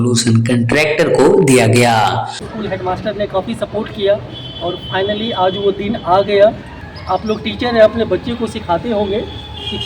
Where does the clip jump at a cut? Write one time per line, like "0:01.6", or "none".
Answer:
0:02.5
0:06.8